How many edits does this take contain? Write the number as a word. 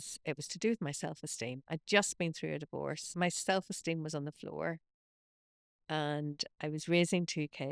one